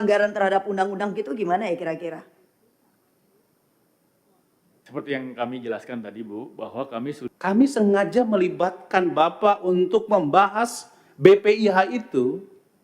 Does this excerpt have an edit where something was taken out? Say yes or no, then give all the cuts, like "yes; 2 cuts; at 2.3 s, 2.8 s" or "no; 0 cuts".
yes; 1 cut; at 7.3 s